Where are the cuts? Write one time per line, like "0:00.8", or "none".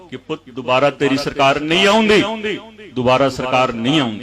none